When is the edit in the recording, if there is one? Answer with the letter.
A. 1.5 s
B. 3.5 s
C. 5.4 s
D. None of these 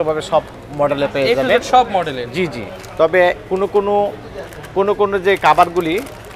D